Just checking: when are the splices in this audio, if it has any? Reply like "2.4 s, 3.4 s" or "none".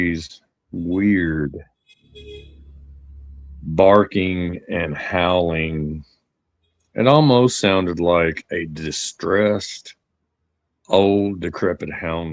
none